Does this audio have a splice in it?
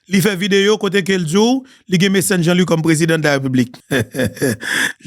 yes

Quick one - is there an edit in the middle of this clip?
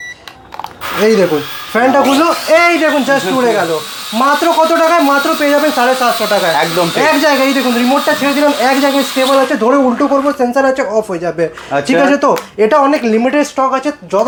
no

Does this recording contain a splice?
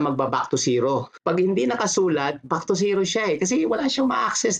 yes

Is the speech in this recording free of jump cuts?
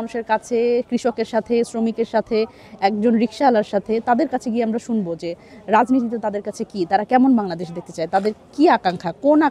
yes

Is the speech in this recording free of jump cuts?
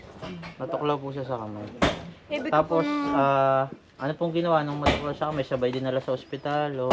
yes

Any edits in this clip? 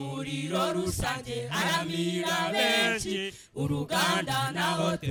no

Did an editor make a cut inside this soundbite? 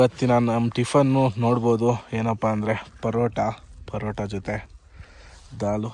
no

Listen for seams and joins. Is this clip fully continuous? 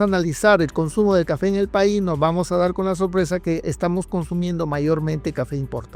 yes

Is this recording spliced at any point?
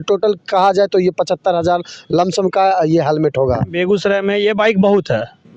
yes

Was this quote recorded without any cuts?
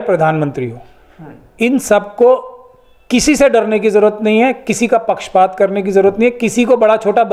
yes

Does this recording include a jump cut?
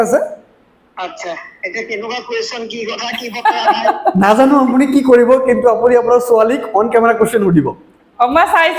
no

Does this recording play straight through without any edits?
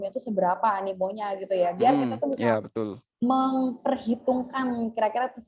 yes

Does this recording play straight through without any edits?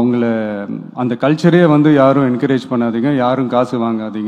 yes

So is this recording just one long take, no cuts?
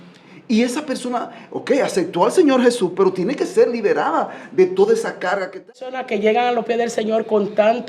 no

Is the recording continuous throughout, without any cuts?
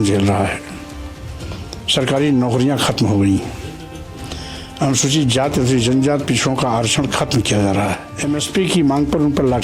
no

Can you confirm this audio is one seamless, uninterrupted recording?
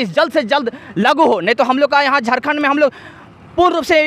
yes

